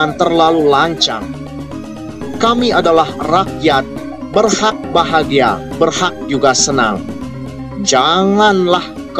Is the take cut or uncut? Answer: uncut